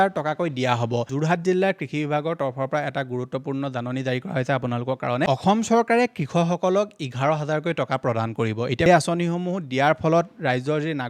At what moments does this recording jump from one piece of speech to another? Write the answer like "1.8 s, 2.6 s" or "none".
1.1 s, 5.3 s, 8.9 s